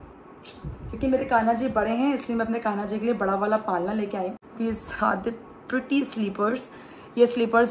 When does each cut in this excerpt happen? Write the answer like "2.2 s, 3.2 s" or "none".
4.4 s